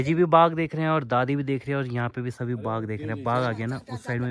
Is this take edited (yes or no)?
no